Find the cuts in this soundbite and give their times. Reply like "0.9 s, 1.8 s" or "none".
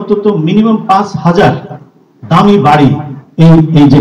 none